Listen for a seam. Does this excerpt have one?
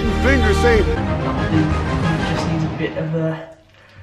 yes; 1 cut; at 1.0 s

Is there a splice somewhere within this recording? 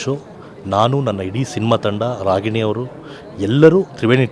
no; 0 cuts

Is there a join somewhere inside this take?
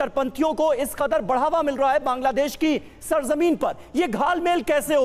no; 0 cuts

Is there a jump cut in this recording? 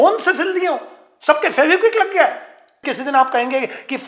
yes; 1 cut; at 2.8 s

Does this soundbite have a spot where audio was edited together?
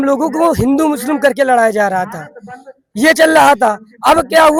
no; 0 cuts

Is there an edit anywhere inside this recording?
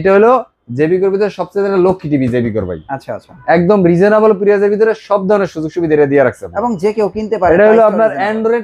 no; 0 cuts

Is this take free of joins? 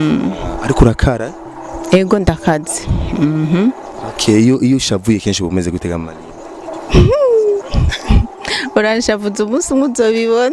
yes; 0 cuts

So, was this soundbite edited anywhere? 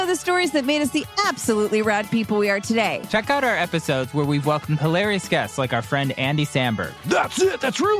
yes; 1 cut; at 3.1 s

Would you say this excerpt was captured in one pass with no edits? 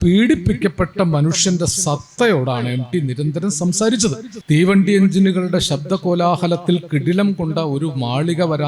no; 1 cut; at 4.3 s

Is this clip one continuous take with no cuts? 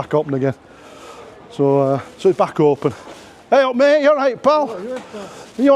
yes; 0 cuts

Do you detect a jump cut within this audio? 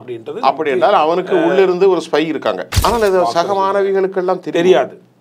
yes; 1 cut; at 2.7 s

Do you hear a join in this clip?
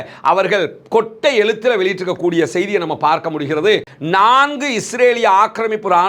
yes; 1 cut; at 3.9 s

